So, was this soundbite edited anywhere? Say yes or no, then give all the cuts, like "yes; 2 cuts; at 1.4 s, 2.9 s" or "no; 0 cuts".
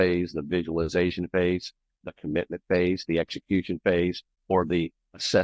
yes; 1 cut; at 4.3 s